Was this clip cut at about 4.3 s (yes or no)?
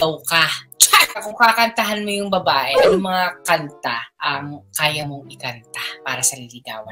no